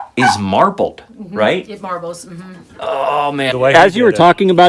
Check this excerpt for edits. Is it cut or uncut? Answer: cut